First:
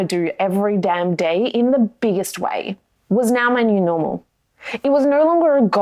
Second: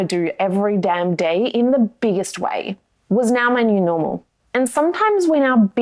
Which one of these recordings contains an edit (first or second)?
second